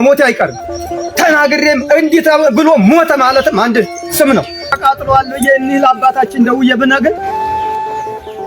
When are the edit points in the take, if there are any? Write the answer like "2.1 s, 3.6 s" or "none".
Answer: 4.6 s